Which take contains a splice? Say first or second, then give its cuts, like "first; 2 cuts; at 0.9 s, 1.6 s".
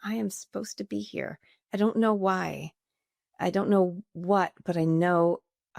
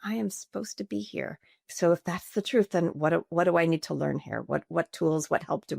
second; 1 cut; at 1.6 s